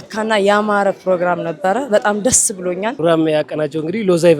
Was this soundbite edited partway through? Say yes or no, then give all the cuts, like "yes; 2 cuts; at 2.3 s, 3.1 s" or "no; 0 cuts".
yes; 1 cut; at 3.0 s